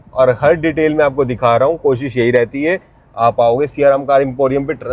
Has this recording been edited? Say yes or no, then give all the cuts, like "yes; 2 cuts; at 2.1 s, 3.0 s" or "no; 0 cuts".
no; 0 cuts